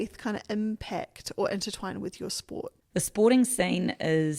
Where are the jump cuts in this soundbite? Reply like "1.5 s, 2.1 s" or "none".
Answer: 2.8 s